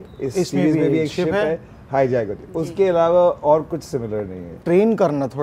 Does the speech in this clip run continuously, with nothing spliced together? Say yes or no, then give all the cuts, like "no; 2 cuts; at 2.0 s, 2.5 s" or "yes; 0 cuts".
no; 1 cut; at 4.5 s